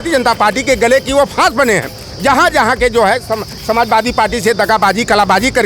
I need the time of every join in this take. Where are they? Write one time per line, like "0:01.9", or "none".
none